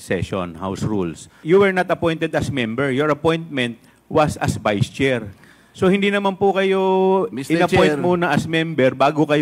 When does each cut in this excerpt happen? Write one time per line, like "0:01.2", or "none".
0:01.4